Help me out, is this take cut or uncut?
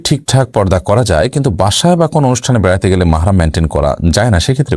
uncut